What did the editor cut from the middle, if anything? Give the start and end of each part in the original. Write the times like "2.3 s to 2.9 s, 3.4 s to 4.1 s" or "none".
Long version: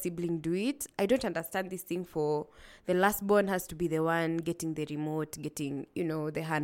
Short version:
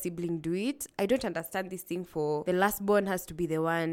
2.4 s to 2.8 s